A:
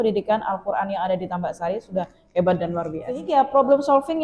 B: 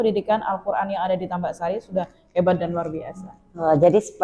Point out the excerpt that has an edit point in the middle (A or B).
A